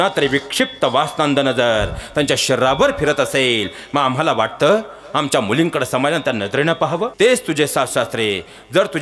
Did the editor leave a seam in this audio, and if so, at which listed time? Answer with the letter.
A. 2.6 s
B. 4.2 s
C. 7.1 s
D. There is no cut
C